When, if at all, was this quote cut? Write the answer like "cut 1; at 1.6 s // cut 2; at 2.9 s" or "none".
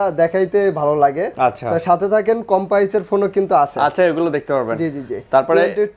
none